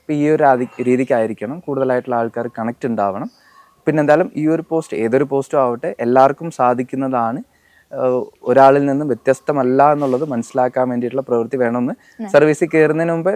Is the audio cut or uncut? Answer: uncut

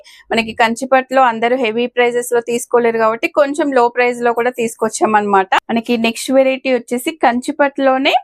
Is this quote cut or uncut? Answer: cut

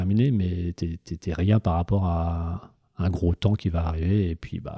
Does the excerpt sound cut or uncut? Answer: uncut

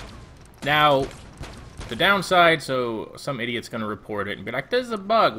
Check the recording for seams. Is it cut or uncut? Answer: cut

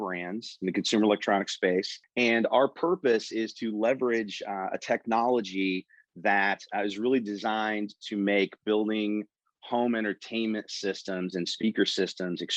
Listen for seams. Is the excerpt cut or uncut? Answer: cut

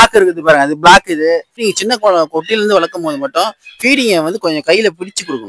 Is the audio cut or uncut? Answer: cut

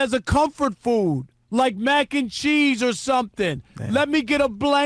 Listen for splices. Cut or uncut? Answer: cut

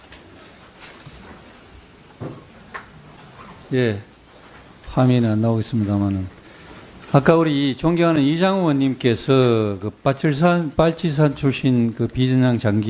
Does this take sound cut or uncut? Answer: uncut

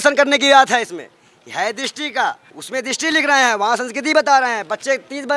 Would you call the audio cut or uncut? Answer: cut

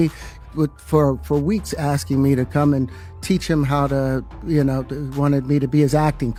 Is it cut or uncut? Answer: uncut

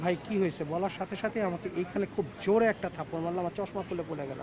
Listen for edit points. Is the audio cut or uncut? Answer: uncut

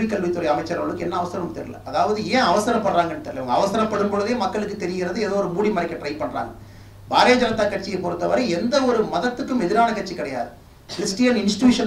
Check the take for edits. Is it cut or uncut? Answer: uncut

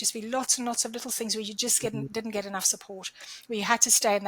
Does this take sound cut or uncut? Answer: uncut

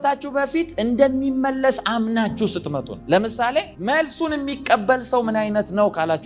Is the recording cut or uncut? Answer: uncut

